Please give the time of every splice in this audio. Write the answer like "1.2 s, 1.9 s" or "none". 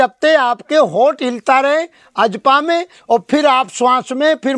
none

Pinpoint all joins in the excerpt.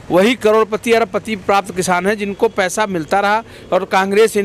none

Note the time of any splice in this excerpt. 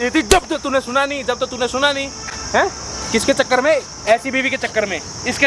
none

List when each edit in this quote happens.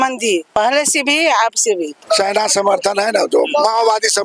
2.0 s

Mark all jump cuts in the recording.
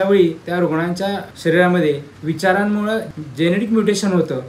1.3 s, 3.1 s

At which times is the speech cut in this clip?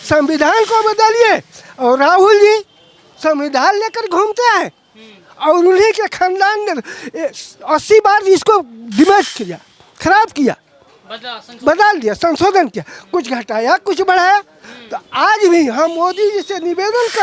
none

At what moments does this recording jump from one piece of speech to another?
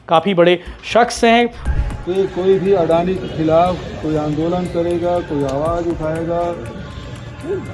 1.6 s

